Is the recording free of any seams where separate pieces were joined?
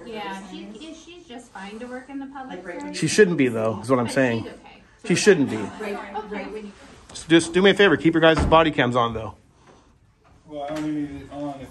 no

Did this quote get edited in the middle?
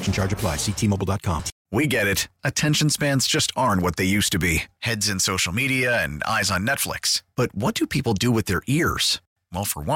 yes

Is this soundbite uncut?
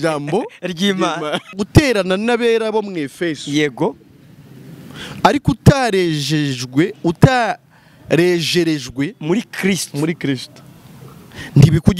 no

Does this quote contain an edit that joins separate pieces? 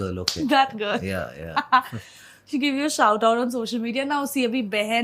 no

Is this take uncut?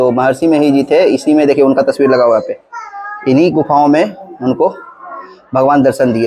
yes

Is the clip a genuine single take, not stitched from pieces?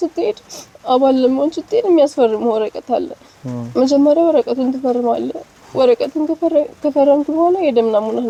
yes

